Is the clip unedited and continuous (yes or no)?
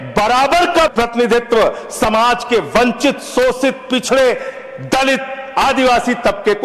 no